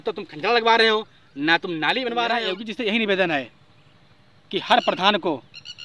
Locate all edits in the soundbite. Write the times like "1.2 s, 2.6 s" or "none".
2.6 s